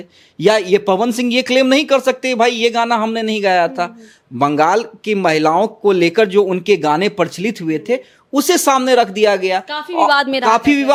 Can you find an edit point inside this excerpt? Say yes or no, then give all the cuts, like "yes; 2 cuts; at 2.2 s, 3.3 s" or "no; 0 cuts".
no; 0 cuts